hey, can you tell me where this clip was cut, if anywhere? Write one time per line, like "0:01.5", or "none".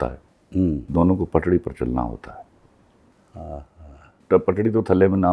0:00.9
0:04.2